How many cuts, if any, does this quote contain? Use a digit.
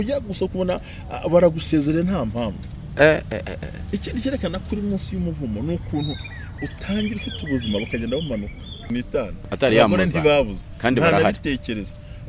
1